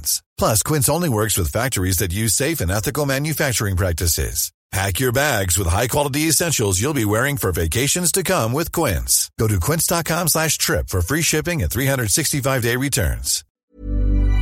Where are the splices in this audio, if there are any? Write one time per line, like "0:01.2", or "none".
0:13.4